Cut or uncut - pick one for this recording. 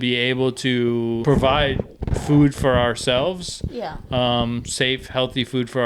cut